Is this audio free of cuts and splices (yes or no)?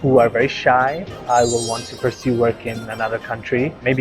no